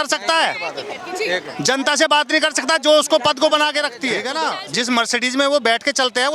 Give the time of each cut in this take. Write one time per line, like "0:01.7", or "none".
0:04.2